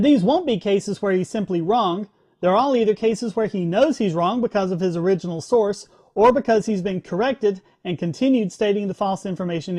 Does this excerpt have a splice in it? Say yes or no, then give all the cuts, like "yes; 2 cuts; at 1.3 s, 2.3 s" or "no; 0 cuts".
no; 0 cuts